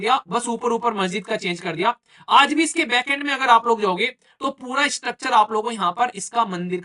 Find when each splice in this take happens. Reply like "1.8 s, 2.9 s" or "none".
none